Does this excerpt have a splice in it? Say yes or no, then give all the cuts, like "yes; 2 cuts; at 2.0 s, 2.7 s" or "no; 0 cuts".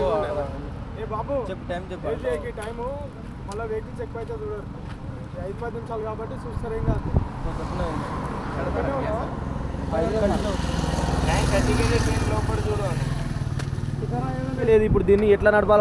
yes; 1 cut; at 14.6 s